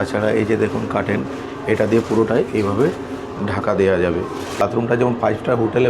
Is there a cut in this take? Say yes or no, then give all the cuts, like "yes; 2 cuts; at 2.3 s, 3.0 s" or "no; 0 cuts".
yes; 1 cut; at 4.6 s